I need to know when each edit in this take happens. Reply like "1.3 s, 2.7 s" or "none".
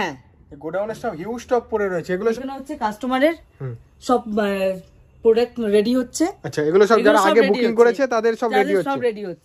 2.1 s